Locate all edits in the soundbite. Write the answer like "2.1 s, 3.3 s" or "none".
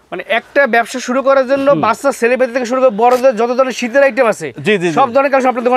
none